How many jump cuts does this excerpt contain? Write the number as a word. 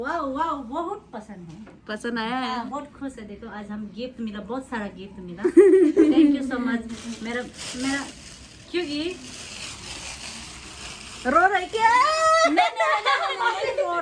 zero